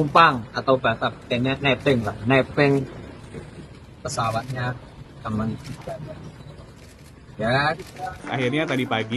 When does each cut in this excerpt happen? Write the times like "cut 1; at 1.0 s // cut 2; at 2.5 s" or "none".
cut 1; at 8.2 s

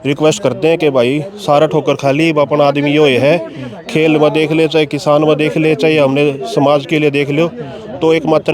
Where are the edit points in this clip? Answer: none

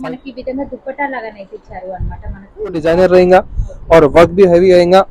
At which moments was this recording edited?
cut 1; at 2.9 s

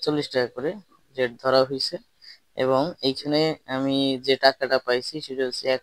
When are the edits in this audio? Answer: none

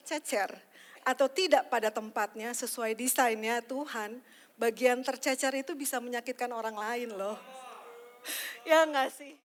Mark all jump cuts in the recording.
none

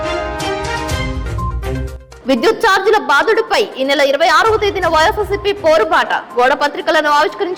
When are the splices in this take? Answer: none

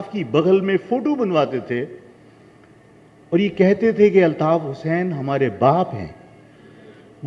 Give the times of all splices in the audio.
none

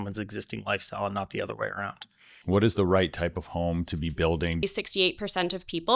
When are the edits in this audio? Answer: cut 1; at 2.4 s // cut 2; at 4.6 s

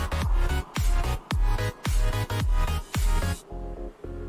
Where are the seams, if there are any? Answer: cut 1; at 1.2 s

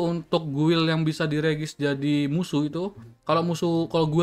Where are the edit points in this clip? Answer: none

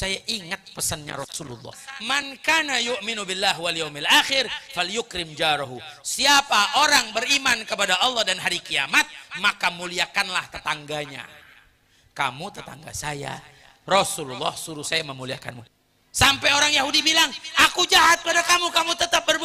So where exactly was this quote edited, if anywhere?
cut 1; at 2.3 s // cut 2; at 15.7 s

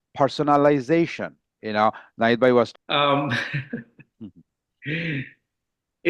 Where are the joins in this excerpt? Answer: cut 1; at 2.7 s

